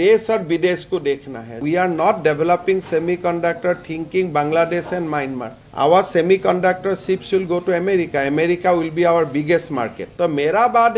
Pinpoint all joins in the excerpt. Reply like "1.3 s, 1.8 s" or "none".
1.6 s, 10.0 s